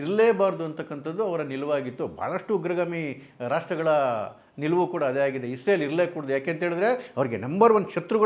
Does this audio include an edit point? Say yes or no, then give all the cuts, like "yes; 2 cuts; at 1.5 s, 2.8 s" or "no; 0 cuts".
no; 0 cuts